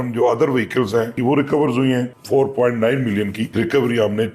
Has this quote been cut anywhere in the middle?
yes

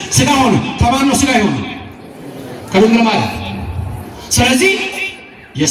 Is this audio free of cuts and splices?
yes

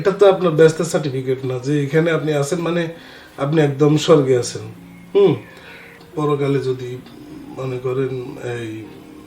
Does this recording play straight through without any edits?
no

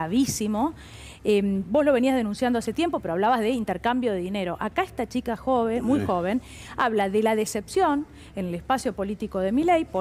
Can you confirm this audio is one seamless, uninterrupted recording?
yes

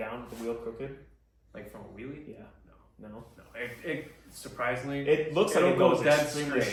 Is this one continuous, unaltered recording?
yes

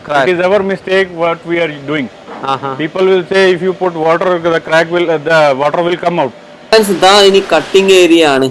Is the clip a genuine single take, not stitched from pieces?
no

